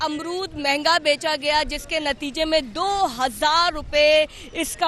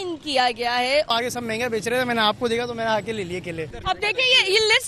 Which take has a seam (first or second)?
second